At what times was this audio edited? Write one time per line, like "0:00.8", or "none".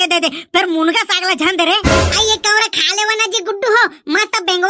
0:01.9